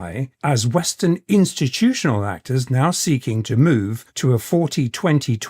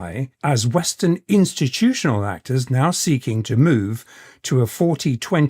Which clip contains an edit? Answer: first; 1 cut; at 4.0 s

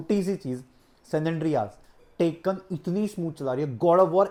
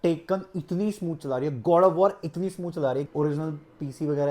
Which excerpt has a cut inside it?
second; 1 cut; at 3.1 s

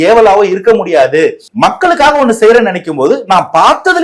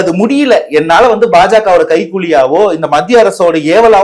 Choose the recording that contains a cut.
first; 1 cut; at 1.4 s

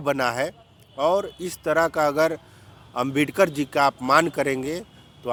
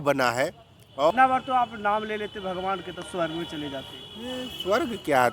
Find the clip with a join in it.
second; 1 cut; at 1.1 s

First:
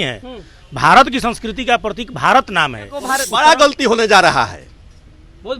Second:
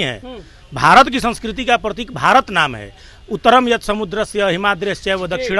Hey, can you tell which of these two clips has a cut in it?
first; 1 cut; at 3.1 s

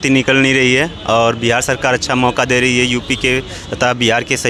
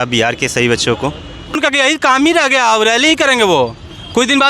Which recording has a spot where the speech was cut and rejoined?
second; 1 cut; at 1.5 s

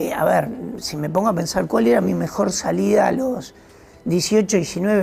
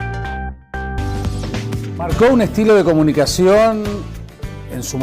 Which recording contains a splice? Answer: second; 1 cut; at 1.0 s

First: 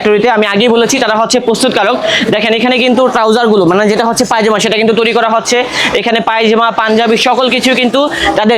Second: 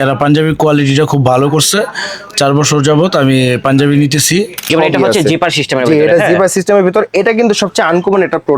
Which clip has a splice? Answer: second; 1 cut; at 4.7 s

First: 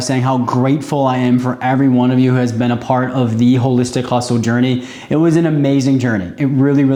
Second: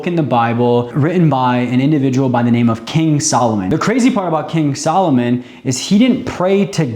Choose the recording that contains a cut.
second; 2 cuts; at 0.9 s, 3.6 s

